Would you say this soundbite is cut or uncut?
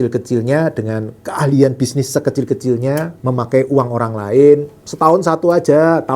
cut